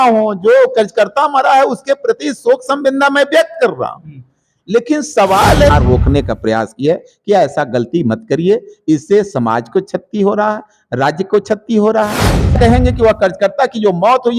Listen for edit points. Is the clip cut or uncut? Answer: cut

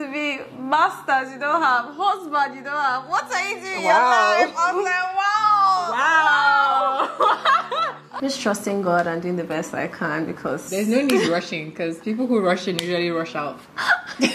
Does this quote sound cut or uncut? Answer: cut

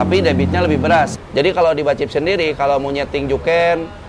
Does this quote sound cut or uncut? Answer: cut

